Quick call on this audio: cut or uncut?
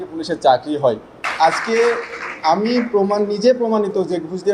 cut